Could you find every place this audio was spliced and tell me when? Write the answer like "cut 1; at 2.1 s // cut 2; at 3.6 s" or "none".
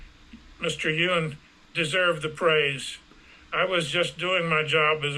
none